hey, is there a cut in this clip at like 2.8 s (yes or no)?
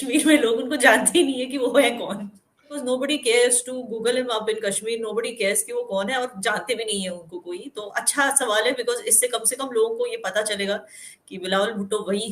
yes